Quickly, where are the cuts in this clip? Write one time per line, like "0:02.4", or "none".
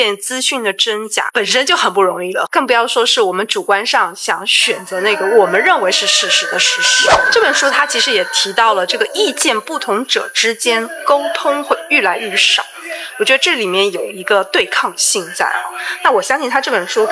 0:01.3